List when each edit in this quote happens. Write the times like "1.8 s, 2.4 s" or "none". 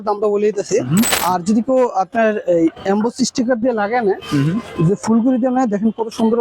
1.2 s